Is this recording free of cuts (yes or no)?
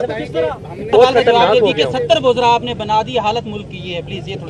no